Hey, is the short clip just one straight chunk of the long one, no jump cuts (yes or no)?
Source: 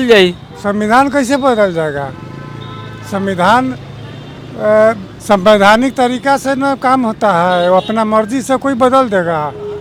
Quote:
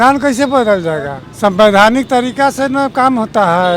no